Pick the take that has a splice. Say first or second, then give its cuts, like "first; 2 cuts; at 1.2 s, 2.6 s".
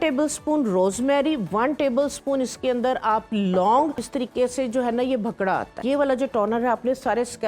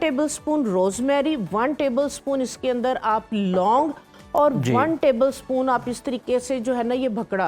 first; 2 cuts; at 4.1 s, 5.8 s